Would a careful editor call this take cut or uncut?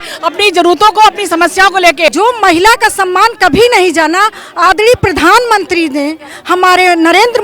cut